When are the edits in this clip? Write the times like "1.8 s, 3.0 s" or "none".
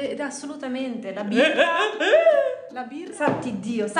3.0 s